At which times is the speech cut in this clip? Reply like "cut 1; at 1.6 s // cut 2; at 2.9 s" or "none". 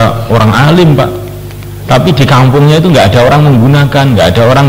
none